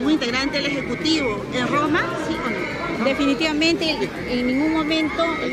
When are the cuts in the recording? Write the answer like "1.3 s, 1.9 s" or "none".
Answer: none